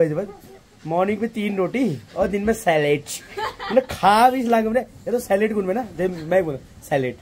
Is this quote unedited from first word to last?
yes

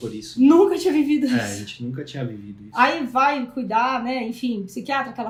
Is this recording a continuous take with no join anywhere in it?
yes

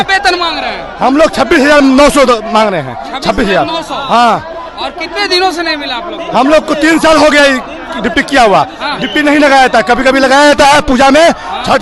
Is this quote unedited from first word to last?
yes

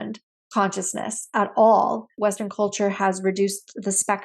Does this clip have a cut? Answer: yes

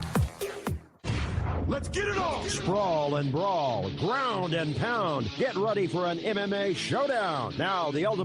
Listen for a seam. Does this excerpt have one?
yes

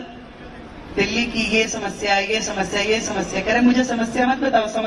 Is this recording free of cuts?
yes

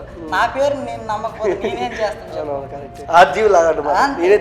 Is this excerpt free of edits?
no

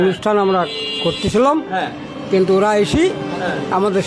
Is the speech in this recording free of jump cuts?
yes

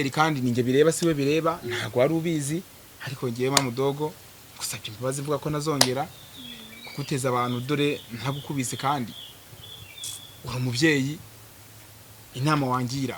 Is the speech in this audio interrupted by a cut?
no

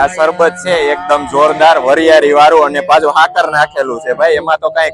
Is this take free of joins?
yes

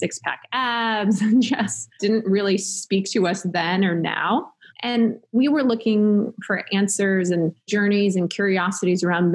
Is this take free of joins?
no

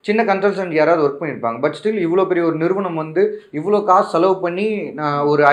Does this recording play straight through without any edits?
yes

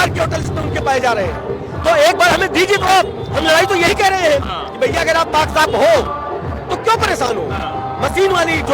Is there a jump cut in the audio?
no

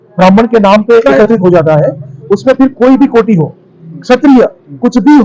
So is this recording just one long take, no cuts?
yes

